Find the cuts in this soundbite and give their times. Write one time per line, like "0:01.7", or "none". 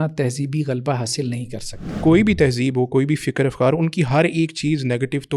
0:01.9